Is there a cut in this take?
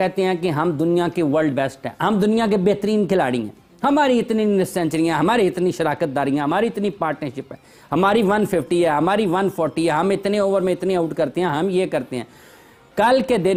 no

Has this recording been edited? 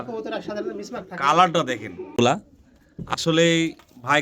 yes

